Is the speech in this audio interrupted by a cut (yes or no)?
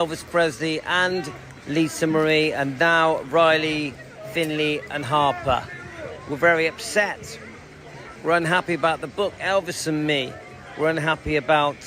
yes